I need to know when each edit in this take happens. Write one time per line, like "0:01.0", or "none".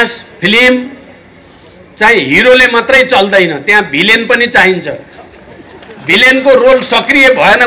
none